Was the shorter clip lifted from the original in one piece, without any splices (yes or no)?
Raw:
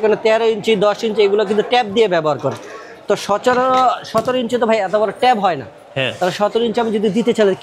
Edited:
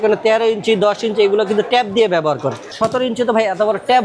no